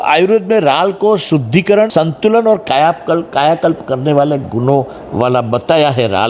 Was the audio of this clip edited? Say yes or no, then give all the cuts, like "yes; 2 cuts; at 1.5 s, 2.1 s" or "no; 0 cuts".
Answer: yes; 1 cut; at 1.9 s